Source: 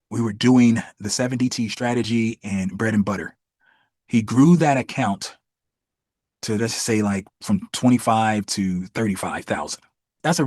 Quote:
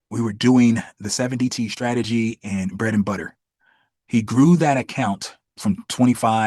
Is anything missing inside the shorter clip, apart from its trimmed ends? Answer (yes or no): yes